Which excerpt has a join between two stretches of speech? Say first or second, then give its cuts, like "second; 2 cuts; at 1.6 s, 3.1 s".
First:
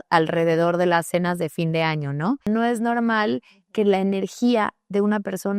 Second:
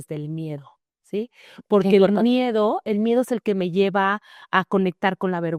first; 1 cut; at 2.4 s